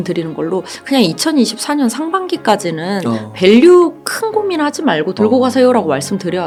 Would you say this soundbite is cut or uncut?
uncut